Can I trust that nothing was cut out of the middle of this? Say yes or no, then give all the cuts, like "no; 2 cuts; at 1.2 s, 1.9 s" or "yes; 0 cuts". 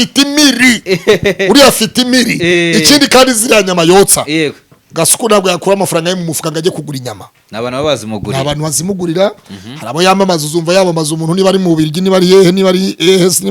yes; 0 cuts